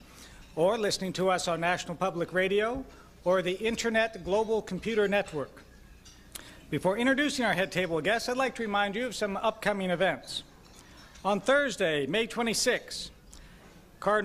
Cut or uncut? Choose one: uncut